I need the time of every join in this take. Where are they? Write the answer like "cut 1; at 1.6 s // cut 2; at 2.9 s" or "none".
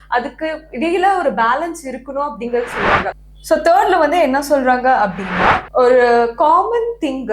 cut 1; at 3.3 s // cut 2; at 5.6 s